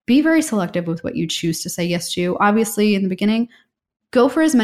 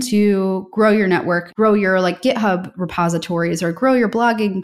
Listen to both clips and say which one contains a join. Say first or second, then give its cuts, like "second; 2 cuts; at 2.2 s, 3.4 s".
second; 1 cut; at 1.4 s